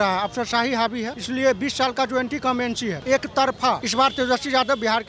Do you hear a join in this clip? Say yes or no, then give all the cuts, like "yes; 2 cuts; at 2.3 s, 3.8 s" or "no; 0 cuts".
yes; 3 cuts; at 1.2 s, 3.0 s, 3.9 s